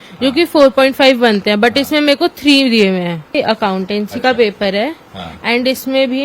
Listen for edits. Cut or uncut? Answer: cut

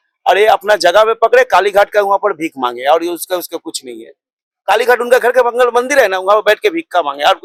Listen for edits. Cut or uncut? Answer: uncut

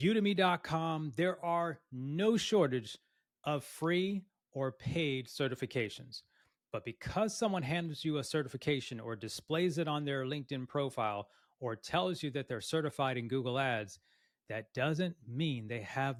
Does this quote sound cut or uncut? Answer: uncut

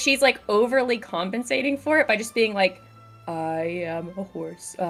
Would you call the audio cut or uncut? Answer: uncut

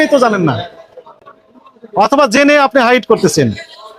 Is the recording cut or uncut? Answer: uncut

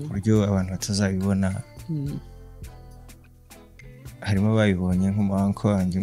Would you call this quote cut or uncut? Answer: uncut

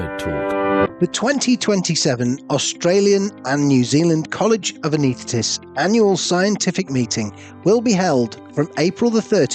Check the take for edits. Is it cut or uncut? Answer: cut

